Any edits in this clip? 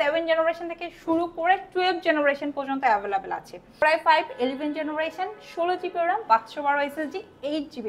yes; 1 cut; at 3.8 s

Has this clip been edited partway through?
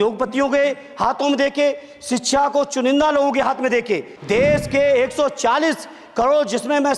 yes; 1 cut; at 4.1 s

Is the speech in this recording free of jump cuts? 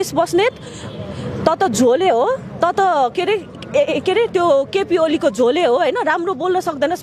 yes; 0 cuts

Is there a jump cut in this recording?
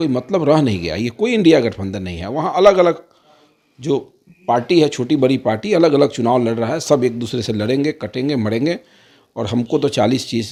no; 0 cuts

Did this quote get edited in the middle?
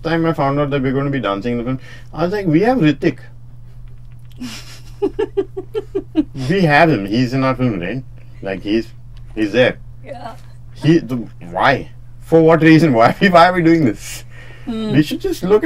no; 0 cuts

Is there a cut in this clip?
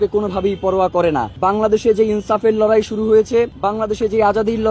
yes; 2 cuts; at 1.3 s, 3.5 s

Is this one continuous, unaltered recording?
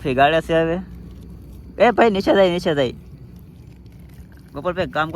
yes; 0 cuts

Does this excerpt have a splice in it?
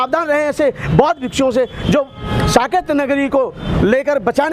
no; 0 cuts

